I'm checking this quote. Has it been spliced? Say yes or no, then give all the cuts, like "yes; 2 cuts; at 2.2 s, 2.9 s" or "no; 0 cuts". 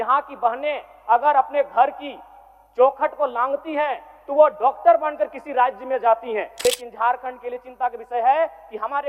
yes; 1 cut; at 6.5 s